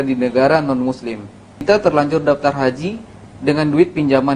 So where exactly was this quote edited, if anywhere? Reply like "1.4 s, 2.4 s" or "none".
1.6 s